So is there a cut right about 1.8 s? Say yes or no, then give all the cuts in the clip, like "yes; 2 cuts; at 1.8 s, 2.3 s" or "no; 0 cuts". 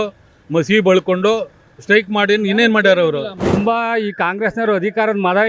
no; 1 cut; at 3.5 s